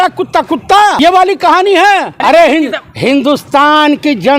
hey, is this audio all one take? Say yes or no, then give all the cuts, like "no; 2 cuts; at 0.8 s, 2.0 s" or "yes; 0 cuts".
no; 2 cuts; at 0.9 s, 2.1 s